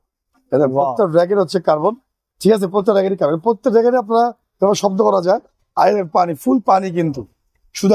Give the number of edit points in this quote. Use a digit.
0